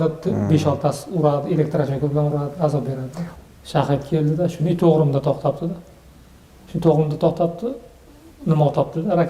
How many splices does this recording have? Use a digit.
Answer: 1